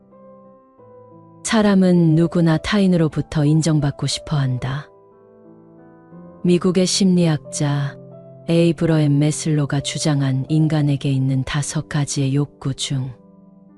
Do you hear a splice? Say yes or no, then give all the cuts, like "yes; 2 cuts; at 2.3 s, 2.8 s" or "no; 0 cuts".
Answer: yes; 3 cuts; at 1.5 s, 4.9 s, 6.4 s